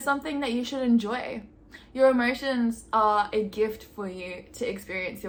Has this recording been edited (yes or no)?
no